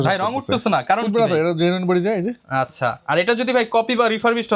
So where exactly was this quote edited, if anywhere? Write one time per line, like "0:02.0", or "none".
none